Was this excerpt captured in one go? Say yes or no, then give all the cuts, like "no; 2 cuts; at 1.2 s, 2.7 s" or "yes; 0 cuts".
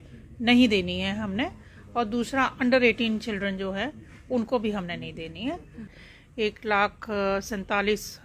no; 1 cut; at 5.9 s